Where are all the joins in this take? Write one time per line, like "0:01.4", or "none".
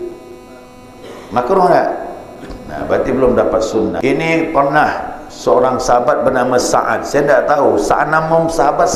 0:04.0